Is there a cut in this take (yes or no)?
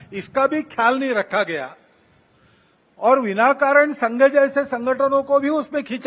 no